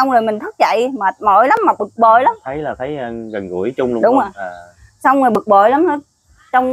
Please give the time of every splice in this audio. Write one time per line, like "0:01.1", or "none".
none